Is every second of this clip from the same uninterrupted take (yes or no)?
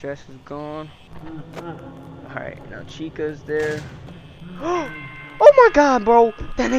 no